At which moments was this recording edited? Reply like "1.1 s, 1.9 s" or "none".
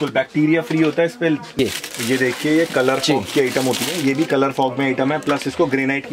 1.5 s